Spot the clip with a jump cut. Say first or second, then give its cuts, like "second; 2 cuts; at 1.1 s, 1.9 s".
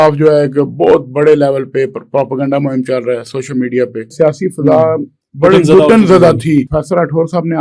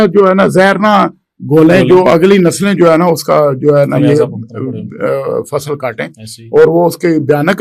first; 2 cuts; at 4.1 s, 6.8 s